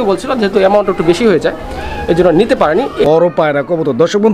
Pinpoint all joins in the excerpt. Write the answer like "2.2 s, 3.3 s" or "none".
3.0 s